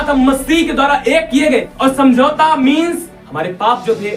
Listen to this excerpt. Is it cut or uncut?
cut